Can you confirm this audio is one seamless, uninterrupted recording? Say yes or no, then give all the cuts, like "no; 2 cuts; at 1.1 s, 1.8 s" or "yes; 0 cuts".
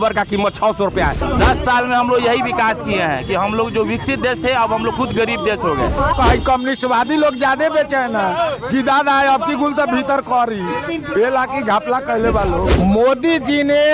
no; 3 cuts; at 1.2 s, 6.1 s, 12.7 s